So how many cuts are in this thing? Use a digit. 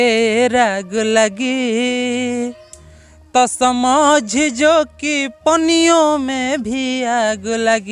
0